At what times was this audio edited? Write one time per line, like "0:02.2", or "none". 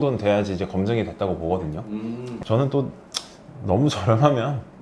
0:02.4